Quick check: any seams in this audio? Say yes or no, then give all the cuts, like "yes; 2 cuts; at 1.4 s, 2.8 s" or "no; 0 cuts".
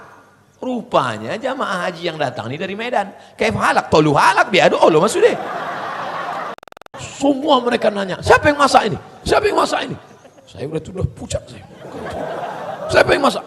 yes; 1 cut; at 6.8 s